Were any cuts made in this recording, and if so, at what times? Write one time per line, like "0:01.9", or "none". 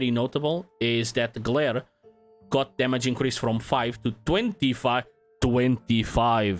none